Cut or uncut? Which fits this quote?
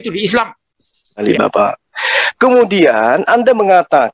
cut